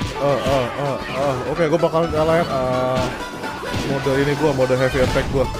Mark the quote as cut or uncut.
uncut